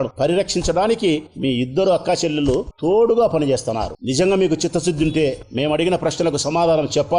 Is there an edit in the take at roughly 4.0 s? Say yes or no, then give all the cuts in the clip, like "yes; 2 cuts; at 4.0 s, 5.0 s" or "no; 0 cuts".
no; 0 cuts